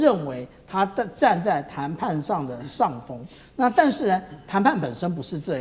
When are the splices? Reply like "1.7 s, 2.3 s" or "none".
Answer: none